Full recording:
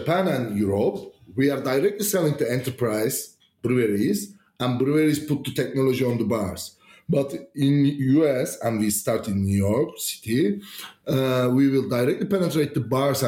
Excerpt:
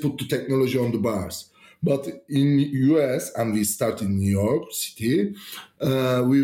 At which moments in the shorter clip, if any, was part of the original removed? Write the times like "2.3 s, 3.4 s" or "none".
none